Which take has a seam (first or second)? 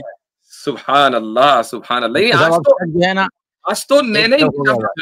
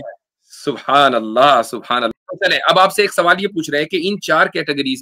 second